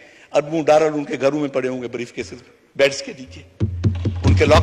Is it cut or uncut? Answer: uncut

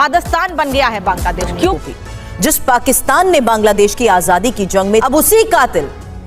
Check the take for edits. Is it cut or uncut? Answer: cut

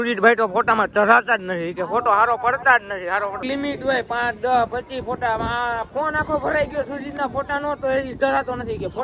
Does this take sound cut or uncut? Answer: cut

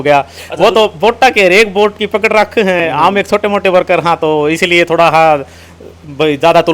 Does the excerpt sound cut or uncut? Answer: uncut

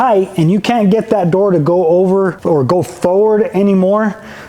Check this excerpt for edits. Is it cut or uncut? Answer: cut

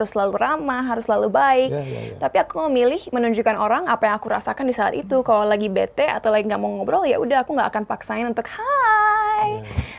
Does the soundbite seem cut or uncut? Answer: uncut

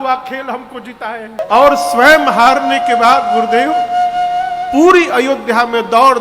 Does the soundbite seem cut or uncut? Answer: cut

